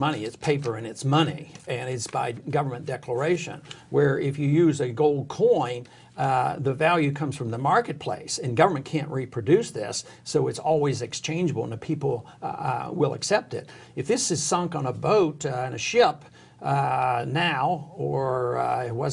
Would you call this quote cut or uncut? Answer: uncut